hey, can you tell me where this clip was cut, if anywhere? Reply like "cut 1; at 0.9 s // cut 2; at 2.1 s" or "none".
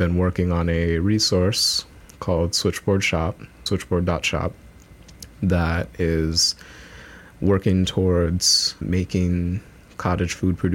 cut 1; at 3.6 s // cut 2; at 8.8 s